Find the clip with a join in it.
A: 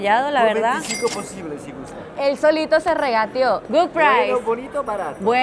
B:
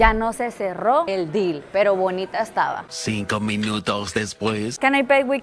A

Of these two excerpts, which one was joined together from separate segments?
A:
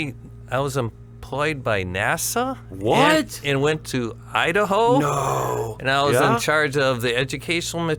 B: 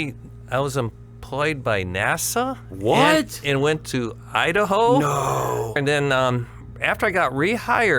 B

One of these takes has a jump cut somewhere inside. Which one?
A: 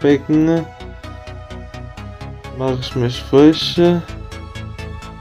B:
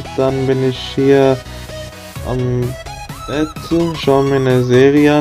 A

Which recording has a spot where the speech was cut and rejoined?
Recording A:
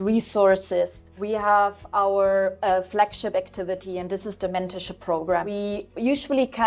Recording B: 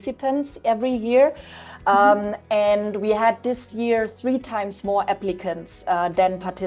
A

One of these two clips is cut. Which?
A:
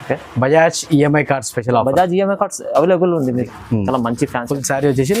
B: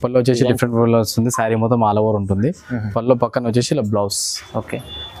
A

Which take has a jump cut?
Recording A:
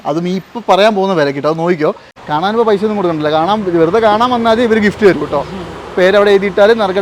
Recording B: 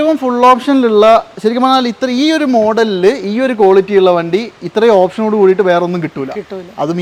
A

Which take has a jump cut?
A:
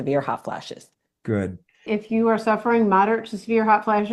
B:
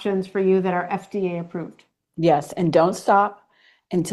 A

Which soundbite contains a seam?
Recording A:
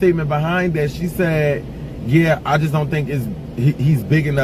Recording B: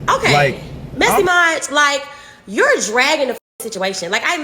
B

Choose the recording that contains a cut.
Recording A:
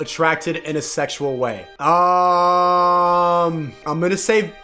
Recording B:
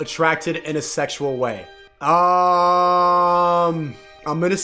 A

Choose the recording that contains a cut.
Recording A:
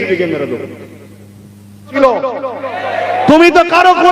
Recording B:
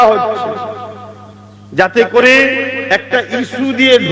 A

